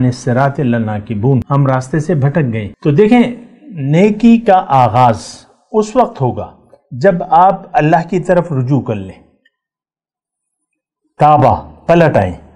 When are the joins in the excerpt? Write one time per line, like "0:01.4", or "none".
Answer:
0:01.5
0:02.7